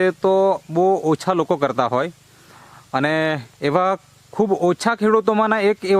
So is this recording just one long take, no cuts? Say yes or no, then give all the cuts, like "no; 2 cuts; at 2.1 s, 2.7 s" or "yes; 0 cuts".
yes; 0 cuts